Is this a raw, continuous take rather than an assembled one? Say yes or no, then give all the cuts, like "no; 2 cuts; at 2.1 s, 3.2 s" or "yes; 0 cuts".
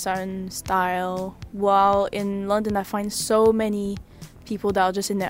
yes; 0 cuts